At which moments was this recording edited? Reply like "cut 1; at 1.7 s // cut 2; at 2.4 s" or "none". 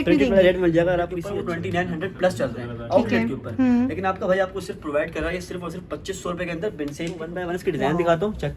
cut 1; at 1.2 s // cut 2; at 7.4 s